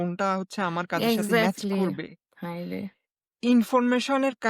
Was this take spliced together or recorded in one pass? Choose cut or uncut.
uncut